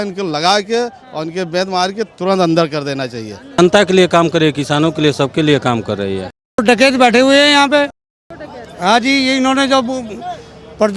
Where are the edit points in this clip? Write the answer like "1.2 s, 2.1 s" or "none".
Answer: 3.6 s, 6.4 s

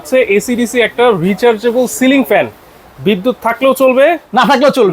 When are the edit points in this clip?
none

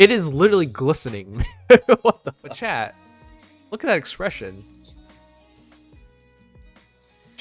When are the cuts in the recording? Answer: 2.5 s

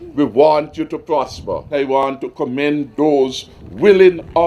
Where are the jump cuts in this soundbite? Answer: 2.1 s

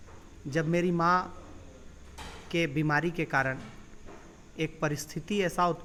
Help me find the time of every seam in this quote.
none

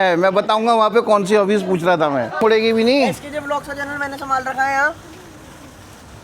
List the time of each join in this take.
2.4 s

